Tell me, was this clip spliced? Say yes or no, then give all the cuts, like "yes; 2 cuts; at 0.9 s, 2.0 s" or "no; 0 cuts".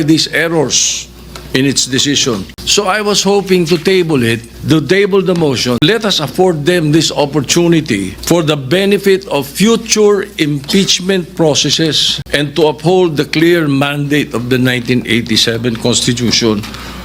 yes; 5 cuts; at 2.6 s, 4.5 s, 5.8 s, 8.1 s, 12.1 s